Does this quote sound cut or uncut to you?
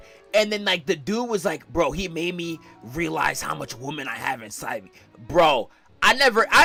uncut